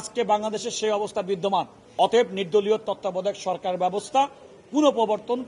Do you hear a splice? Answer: yes; 1 cut; at 1.8 s

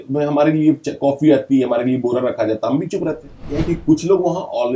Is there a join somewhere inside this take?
yes; 1 cut; at 3.4 s

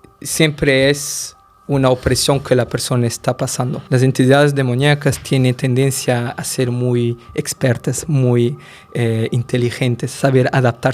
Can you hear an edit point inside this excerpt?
yes; 1 cut; at 3.7 s

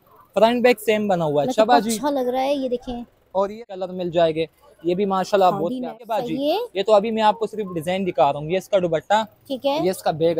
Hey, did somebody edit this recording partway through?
yes; 2 cuts; at 3.7 s, 5.8 s

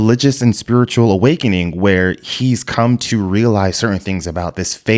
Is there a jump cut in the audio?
no; 0 cuts

